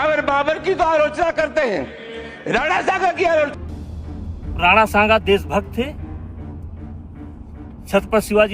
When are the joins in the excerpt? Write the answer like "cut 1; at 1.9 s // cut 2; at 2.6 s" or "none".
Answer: cut 1; at 3.5 s